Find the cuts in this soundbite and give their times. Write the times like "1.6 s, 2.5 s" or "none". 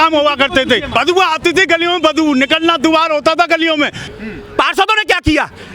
0.9 s, 4.0 s